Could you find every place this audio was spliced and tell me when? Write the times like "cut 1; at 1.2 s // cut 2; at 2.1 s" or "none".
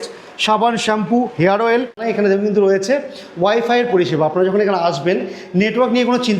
cut 1; at 2.0 s